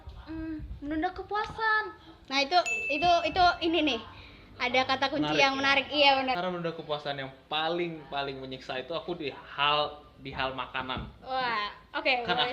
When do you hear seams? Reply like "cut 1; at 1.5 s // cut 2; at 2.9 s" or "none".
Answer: cut 1; at 6.4 s